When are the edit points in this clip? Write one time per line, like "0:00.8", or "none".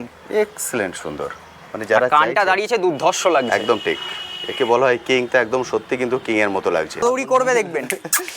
0:07.0